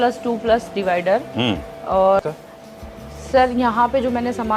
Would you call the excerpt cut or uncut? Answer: cut